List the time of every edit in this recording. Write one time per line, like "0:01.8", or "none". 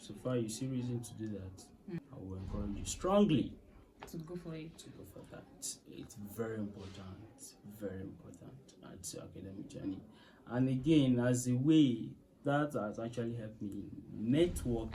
0:02.0